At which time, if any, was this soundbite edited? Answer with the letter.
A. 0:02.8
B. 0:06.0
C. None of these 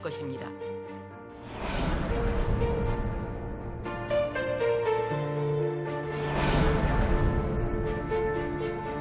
C